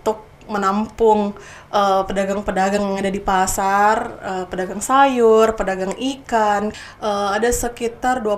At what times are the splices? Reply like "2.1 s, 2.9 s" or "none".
6.8 s